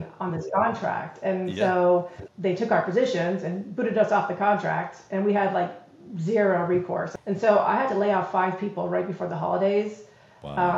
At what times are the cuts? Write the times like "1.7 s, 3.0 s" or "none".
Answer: 2.2 s, 7.1 s